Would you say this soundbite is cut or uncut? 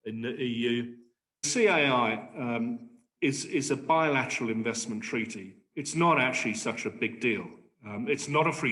cut